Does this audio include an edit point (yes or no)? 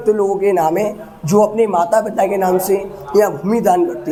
no